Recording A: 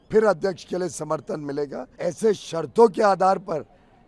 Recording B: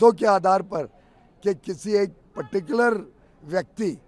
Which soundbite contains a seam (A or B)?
A